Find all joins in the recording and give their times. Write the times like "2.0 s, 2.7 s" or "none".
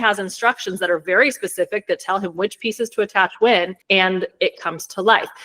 3.8 s